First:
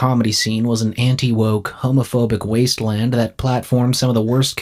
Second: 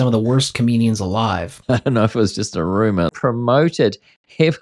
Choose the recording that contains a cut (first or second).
second